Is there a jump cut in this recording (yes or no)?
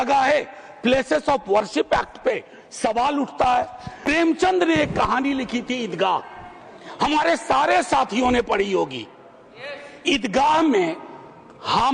yes